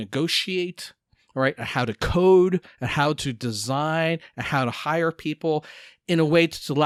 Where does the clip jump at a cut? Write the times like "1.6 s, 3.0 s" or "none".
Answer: none